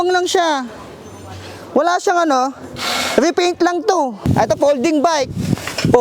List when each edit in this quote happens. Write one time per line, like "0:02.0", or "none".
0:04.2